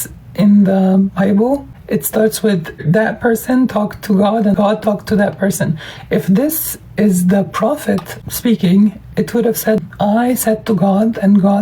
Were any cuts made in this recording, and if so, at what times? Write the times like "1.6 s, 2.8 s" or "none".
1.7 s, 2.8 s, 4.5 s, 8.1 s, 9.9 s